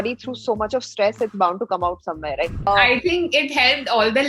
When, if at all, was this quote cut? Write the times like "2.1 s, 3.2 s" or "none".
2.6 s